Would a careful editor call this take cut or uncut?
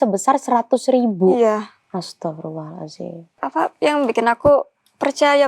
cut